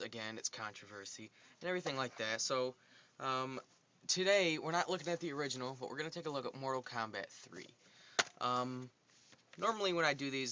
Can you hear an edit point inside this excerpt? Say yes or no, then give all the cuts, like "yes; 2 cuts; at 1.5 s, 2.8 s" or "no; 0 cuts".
no; 0 cuts